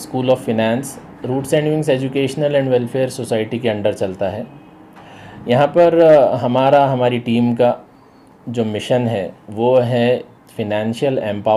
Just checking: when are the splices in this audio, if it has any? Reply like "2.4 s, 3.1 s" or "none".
none